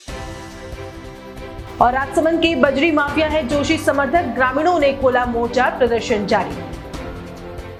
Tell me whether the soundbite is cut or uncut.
uncut